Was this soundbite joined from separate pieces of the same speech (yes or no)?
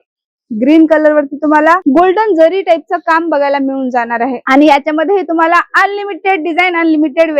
no